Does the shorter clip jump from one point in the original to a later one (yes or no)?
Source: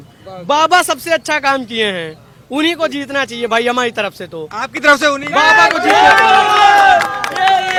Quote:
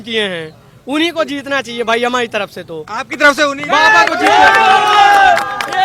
no